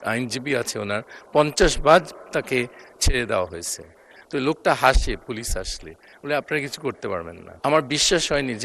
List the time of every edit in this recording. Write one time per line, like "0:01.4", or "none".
0:07.4